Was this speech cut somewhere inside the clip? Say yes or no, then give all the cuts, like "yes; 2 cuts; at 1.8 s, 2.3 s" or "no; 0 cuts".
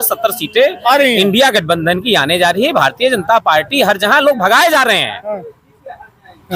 no; 0 cuts